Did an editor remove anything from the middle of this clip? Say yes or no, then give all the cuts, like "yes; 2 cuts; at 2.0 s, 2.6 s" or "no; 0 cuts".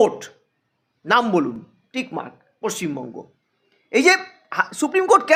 no; 0 cuts